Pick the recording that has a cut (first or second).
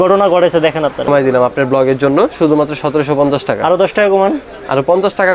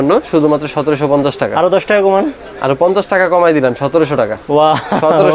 first